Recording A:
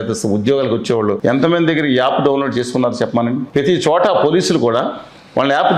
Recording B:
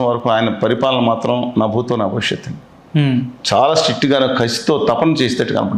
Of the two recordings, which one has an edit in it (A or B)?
A